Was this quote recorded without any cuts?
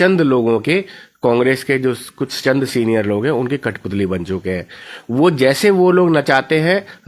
yes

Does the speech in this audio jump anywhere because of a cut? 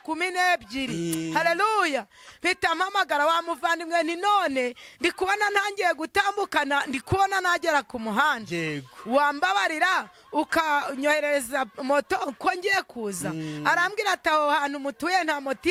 no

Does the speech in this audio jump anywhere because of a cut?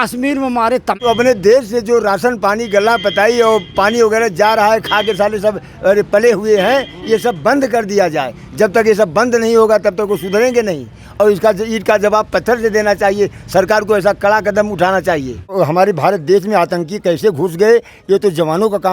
yes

